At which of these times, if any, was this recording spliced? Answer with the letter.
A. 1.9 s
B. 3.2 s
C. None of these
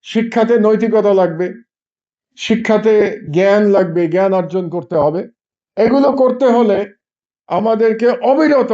C